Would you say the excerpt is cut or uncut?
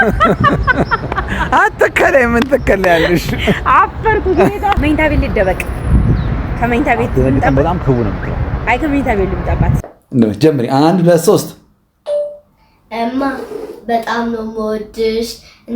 cut